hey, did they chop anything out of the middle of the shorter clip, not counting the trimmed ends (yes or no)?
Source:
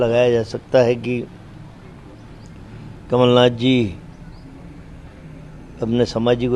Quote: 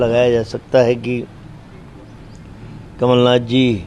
yes